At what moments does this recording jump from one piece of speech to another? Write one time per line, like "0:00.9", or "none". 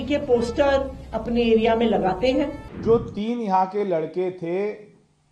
0:02.7